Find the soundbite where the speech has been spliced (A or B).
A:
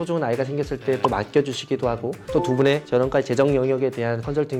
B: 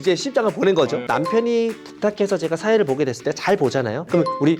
B